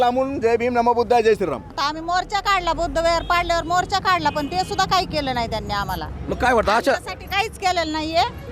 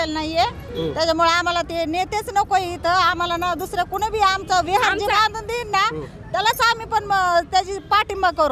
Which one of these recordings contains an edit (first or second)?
first